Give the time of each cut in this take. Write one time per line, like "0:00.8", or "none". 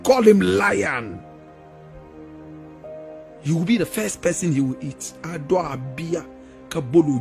none